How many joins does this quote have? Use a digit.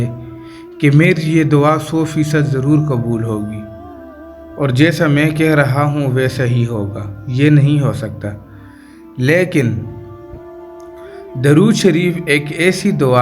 2